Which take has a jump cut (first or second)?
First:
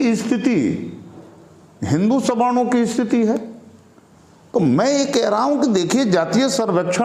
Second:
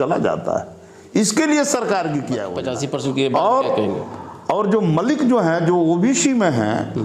second